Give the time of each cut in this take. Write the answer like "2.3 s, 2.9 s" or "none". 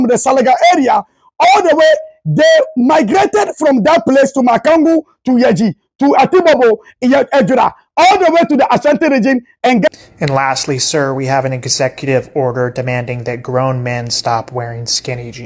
9.9 s